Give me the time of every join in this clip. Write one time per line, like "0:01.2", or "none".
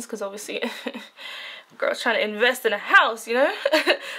none

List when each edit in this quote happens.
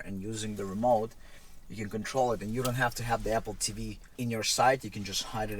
0:04.0

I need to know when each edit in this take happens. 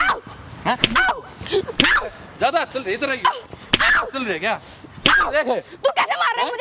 none

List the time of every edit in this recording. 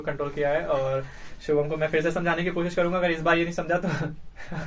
none

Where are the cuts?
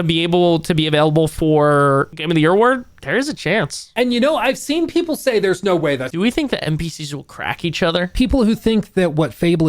0:02.2
0:03.8
0:06.1
0:08.1

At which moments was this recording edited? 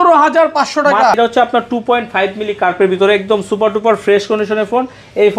0:01.2

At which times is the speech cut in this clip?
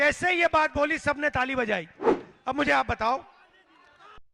0:02.3

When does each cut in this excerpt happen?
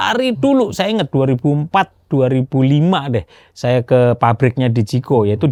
none

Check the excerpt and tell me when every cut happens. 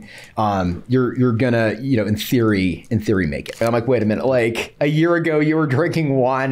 0:03.6

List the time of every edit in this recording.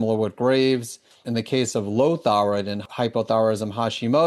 0:01.2
0:02.8

